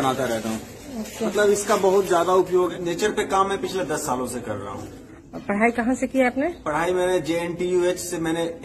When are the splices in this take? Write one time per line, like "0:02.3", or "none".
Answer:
0:02.8